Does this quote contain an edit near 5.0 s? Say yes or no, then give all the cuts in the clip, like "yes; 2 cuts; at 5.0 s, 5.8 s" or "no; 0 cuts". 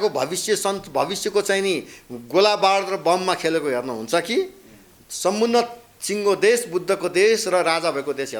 no; 0 cuts